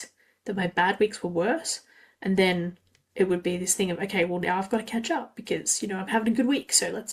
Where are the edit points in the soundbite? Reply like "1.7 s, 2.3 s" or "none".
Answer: none